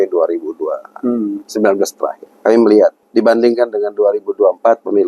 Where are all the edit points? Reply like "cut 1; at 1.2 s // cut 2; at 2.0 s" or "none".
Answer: cut 1; at 2.3 s // cut 2; at 3.0 s